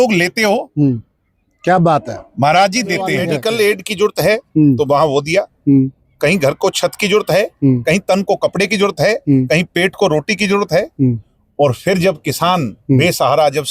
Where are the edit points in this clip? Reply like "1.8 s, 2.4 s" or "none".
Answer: 3.4 s